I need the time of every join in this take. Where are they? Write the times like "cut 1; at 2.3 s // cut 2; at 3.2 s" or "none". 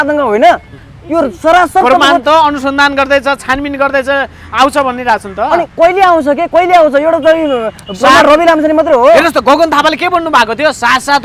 none

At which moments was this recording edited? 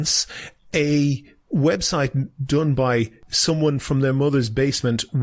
cut 1; at 3.2 s

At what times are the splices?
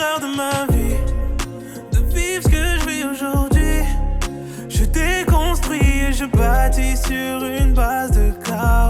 none

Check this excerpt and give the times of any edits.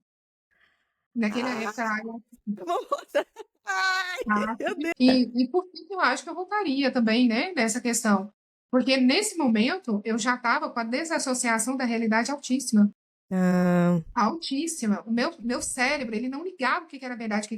cut 1; at 4.9 s

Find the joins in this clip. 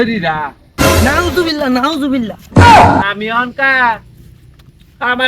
cut 1; at 2.4 s // cut 2; at 3.1 s

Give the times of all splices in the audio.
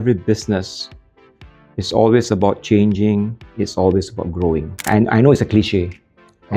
cut 1; at 4.9 s

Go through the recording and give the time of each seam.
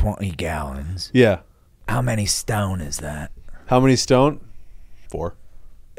cut 1; at 1.8 s

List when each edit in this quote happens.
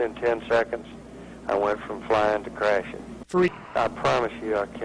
cut 1; at 3.6 s

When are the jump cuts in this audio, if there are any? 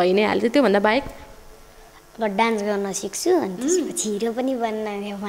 none

